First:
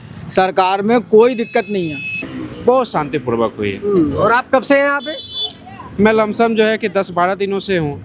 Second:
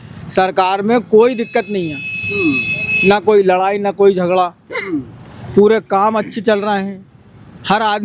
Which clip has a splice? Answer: first; 1 cut; at 2.2 s

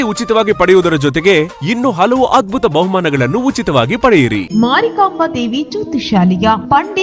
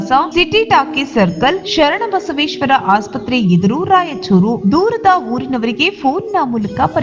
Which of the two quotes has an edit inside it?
first; 1 cut; at 4.5 s

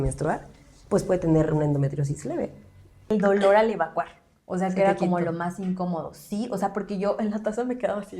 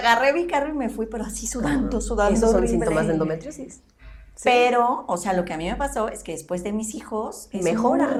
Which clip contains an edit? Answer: first; 1 cut; at 3.1 s

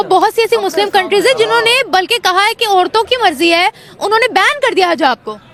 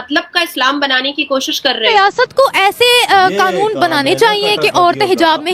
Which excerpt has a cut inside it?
second; 1 cut; at 1.9 s

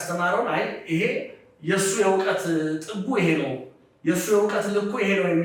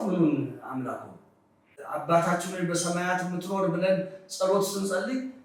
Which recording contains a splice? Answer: second; 1 cut; at 1.7 s

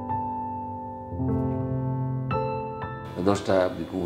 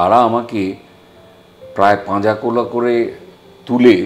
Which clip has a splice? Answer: first; 1 cut; at 2.9 s

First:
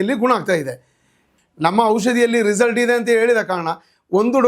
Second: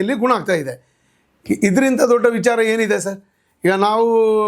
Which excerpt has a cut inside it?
first; 1 cut; at 1.3 s

